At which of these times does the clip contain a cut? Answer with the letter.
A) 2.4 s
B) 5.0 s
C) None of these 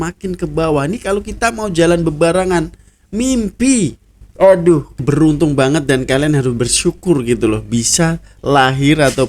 B